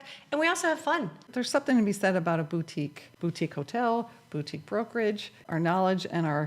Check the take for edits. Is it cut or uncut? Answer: cut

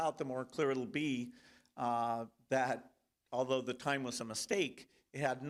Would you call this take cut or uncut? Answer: uncut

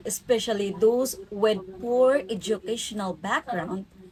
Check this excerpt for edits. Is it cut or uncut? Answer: uncut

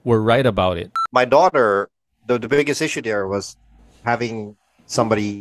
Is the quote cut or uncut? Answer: cut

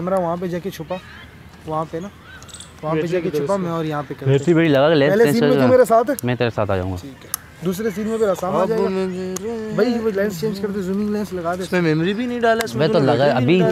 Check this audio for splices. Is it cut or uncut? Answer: cut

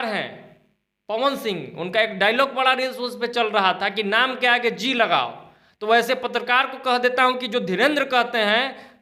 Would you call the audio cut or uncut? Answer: uncut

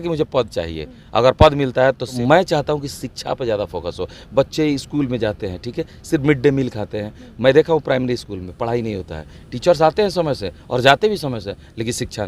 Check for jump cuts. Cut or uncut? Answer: cut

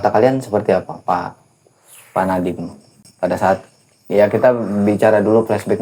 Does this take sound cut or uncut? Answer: uncut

